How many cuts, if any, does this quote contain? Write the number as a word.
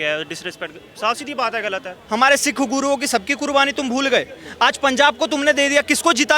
one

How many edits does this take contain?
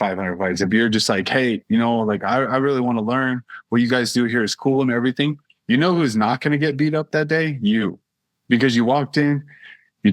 one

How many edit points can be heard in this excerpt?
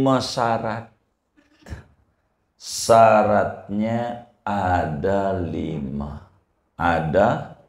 one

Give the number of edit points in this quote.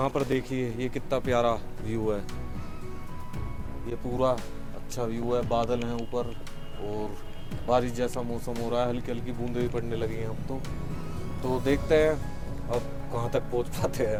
zero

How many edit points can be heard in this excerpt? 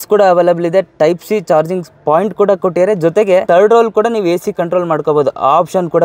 one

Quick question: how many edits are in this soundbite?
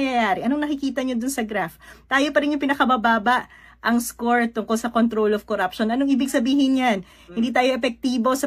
one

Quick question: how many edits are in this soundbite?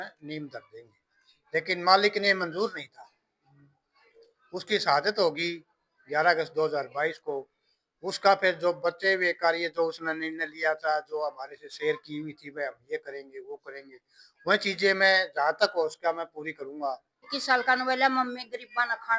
one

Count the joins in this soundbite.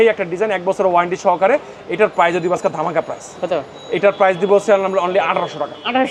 zero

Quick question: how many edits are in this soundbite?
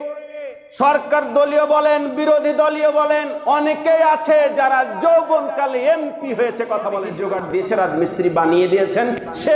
one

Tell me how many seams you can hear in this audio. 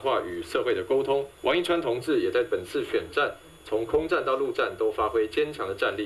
one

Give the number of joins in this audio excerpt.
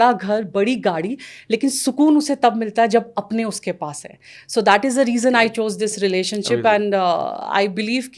zero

